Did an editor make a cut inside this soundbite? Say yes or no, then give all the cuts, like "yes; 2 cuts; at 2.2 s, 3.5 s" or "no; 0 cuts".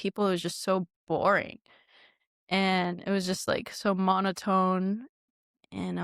no; 0 cuts